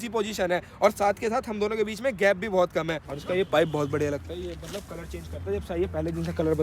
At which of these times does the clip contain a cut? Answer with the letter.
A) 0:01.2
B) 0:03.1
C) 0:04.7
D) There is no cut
B